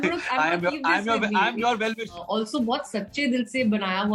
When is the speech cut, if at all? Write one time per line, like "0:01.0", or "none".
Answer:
0:02.2